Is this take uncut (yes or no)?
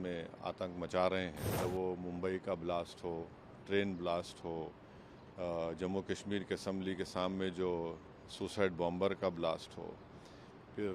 no